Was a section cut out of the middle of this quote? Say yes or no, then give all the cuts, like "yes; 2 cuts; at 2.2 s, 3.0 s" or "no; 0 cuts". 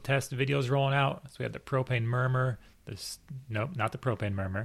no; 0 cuts